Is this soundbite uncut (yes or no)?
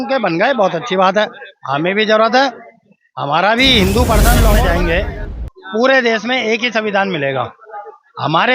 no